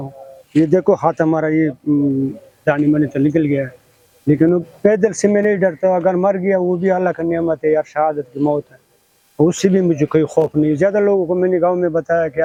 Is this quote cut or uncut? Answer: uncut